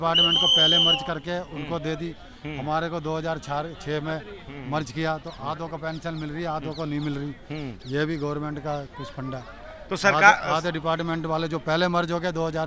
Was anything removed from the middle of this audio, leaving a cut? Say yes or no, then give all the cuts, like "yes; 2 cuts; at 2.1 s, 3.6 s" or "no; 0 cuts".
no; 0 cuts